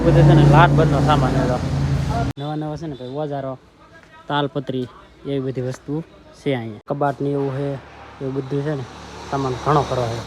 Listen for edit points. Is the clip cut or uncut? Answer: cut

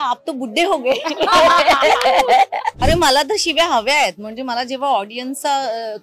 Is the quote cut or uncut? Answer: cut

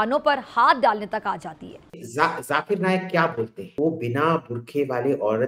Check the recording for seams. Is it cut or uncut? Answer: cut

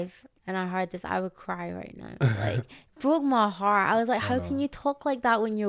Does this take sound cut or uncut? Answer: uncut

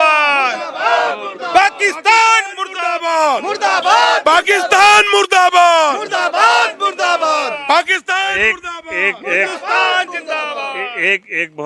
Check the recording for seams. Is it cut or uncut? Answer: uncut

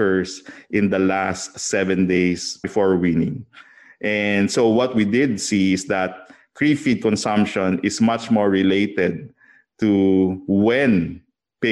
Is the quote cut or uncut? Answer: cut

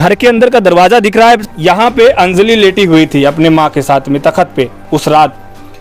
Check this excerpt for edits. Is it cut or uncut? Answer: cut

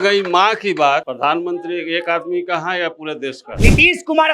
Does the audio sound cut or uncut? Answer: cut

